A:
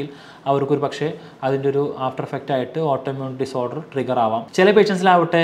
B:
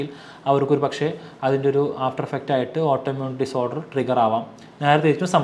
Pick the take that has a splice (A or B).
A